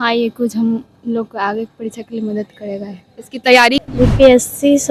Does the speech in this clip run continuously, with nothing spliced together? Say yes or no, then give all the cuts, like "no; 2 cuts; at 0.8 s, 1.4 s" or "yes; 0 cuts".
no; 1 cut; at 3.8 s